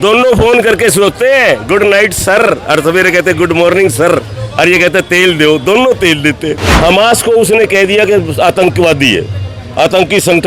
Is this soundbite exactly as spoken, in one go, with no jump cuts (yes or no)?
no